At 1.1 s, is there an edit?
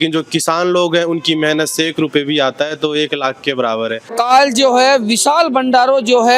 no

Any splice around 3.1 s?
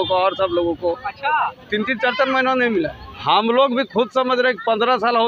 yes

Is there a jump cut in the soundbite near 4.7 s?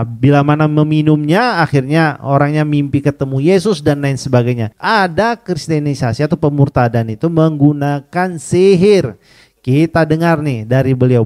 yes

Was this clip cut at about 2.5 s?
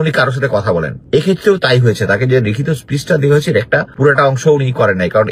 no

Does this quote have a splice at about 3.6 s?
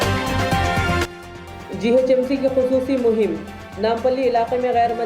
no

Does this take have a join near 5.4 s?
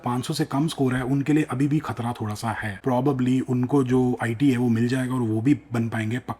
no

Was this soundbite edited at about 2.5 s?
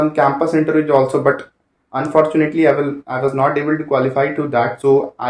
no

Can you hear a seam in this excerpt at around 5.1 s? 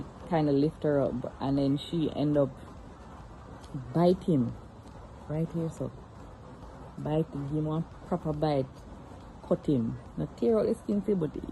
no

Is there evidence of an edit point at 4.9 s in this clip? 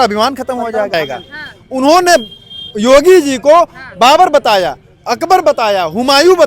no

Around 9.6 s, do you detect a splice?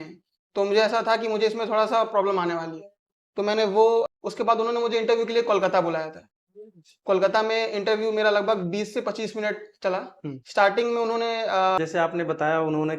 no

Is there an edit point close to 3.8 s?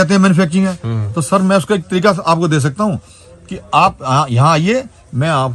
no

